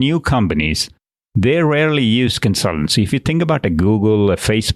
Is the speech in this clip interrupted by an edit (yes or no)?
no